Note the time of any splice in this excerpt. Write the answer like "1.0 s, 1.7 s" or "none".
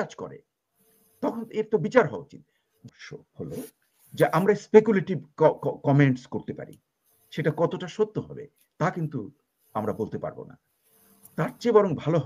2.9 s